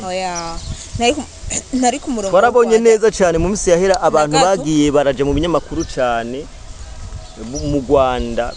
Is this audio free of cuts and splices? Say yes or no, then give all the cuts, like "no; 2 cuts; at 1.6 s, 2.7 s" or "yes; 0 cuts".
yes; 0 cuts